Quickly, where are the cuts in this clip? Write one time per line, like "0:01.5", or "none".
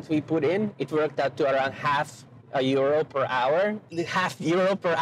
0:03.9

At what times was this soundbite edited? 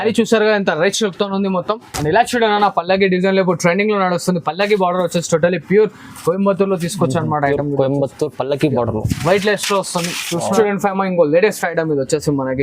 0:01.9
0:10.5

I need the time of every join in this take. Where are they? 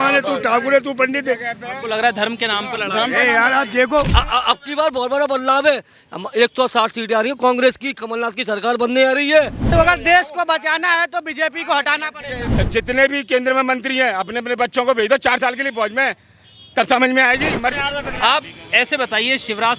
0:04.1
0:09.7
0:12.5
0:17.7

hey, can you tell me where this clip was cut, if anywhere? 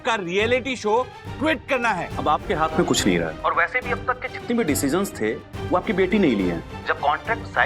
0:02.1
0:03.3
0:06.7

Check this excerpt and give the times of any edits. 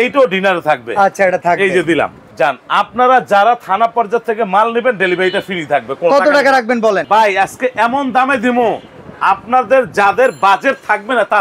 0:02.3
0:07.0

